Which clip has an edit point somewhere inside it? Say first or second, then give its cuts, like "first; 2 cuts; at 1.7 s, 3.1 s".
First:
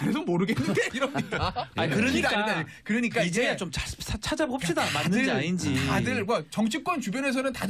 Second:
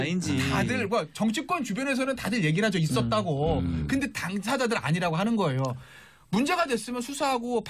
first; 1 cut; at 1.3 s